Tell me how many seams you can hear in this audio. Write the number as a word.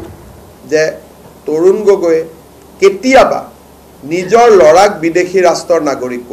zero